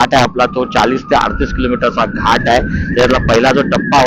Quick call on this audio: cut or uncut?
uncut